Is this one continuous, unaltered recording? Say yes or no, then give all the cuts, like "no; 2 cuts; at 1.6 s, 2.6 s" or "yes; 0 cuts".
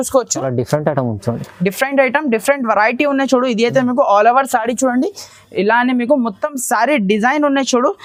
yes; 0 cuts